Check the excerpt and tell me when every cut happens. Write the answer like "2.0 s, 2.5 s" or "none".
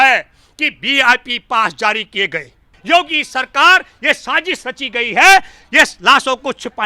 2.7 s